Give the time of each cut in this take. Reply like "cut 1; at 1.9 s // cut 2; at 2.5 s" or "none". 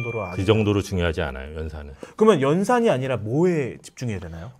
none